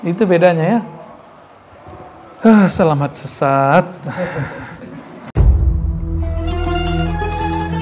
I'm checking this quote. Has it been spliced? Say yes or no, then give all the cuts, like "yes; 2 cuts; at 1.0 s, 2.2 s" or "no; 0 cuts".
yes; 1 cut; at 5.3 s